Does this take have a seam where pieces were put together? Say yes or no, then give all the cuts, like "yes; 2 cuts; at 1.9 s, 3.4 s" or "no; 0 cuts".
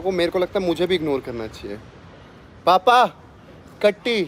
no; 0 cuts